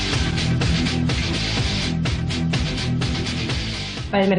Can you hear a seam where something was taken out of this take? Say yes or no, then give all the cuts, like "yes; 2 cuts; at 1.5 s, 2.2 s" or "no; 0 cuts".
no; 0 cuts